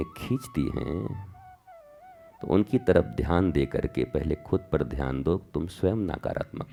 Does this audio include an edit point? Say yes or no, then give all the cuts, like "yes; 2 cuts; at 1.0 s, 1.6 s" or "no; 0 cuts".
no; 0 cuts